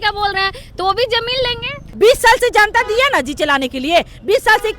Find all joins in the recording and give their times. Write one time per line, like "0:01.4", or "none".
0:01.8